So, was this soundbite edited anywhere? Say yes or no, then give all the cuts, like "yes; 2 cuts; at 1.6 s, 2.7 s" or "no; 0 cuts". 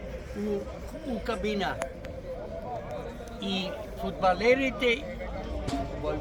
no; 0 cuts